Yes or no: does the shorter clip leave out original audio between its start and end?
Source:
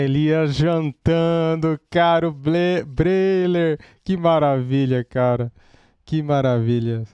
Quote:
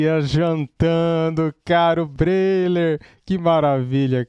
yes